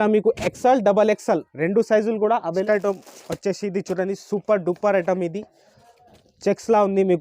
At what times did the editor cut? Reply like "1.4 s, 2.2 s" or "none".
2.6 s